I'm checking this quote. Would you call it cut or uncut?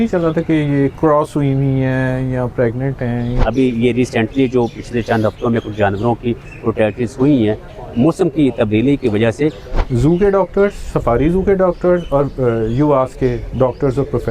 cut